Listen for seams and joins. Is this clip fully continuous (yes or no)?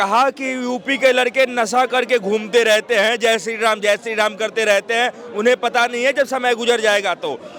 yes